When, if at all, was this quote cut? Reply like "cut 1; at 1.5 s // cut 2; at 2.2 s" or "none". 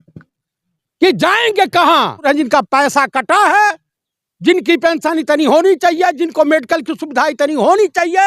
cut 1; at 2.2 s